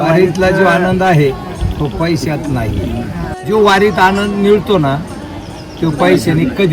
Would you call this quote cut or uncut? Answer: cut